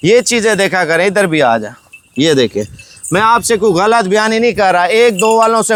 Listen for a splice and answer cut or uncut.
uncut